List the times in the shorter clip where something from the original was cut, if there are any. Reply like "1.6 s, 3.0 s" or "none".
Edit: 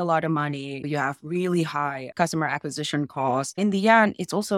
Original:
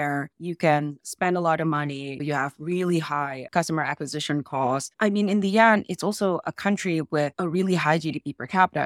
3.6 s